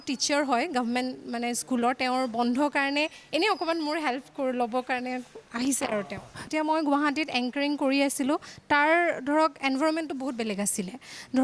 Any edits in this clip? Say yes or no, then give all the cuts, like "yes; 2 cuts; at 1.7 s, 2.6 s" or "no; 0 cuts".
yes; 1 cut; at 6.5 s